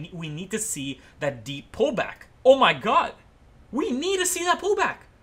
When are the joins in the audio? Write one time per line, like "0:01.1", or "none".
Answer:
0:02.2